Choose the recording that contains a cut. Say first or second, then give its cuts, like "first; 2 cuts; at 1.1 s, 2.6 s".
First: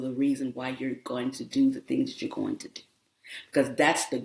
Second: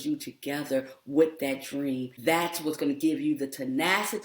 second; 1 cut; at 2.1 s